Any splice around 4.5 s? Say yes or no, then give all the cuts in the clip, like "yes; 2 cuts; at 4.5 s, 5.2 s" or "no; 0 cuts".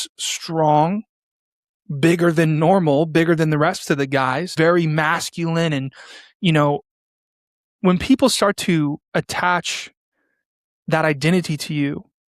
yes; 2 cuts; at 4.5 s, 9.0 s